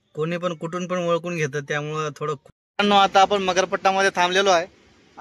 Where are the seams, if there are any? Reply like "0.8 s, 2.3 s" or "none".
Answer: 2.5 s